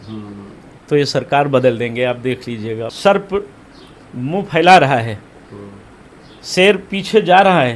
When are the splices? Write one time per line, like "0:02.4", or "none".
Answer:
0:02.9